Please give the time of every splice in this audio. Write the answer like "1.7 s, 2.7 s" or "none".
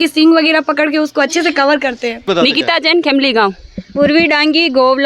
2.3 s